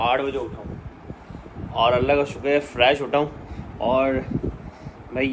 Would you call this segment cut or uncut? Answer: uncut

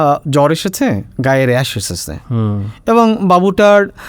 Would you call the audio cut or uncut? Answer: uncut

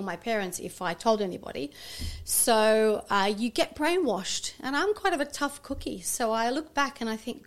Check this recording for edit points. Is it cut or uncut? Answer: uncut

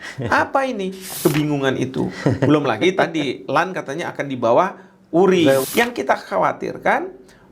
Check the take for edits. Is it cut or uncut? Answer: cut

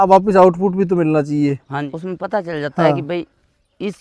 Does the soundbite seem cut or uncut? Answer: cut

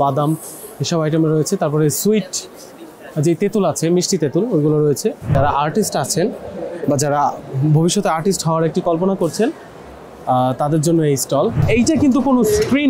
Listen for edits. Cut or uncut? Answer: cut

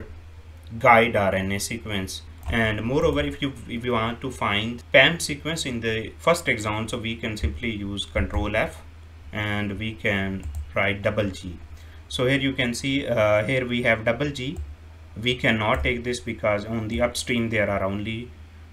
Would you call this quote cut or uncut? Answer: cut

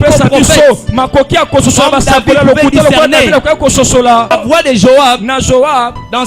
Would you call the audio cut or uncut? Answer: cut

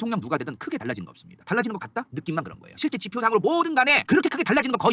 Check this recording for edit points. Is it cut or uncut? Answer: uncut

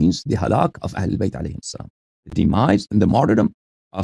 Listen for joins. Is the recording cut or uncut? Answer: uncut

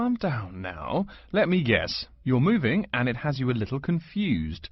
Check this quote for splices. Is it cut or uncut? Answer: uncut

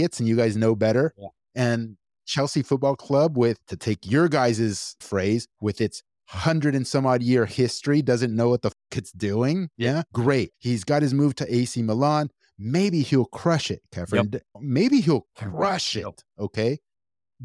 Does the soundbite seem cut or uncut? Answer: uncut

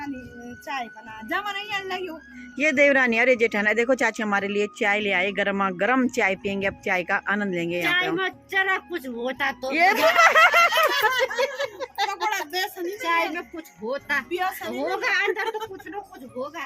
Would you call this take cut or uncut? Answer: uncut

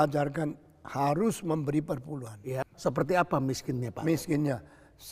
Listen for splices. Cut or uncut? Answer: cut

